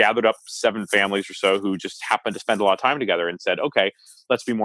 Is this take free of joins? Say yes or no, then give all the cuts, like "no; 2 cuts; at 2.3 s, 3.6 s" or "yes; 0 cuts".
yes; 0 cuts